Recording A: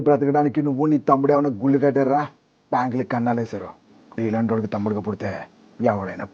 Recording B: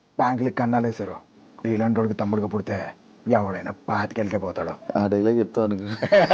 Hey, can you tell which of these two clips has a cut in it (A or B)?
B